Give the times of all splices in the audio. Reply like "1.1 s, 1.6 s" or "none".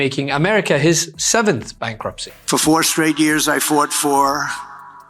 2.4 s

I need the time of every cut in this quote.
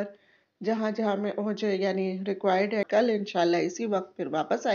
2.9 s

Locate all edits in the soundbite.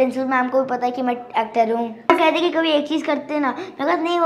2.1 s

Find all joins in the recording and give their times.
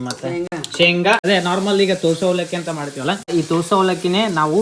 1.2 s, 3.3 s

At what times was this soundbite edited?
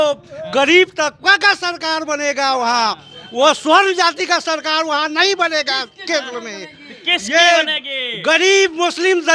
none

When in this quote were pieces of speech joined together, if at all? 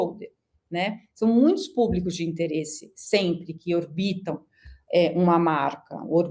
none

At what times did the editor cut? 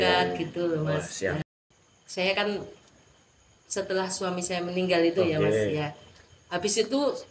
1.4 s

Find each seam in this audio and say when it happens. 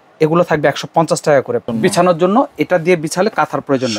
1.7 s

